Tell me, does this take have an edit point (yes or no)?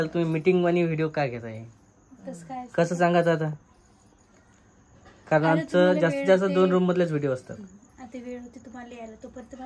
no